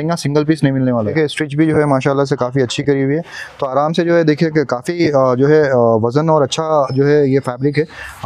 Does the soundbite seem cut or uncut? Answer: cut